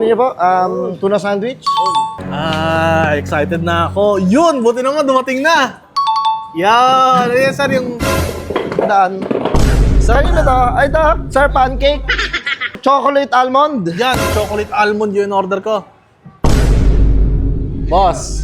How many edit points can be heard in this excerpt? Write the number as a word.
two